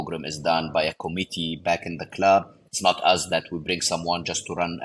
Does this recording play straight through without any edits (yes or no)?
no